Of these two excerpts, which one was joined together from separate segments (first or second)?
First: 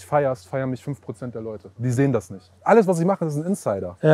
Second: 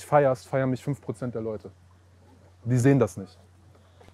first